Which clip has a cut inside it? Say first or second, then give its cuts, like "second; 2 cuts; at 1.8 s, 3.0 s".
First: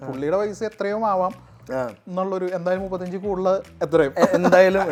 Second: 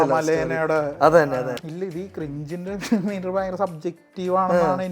second; 1 cut; at 1.6 s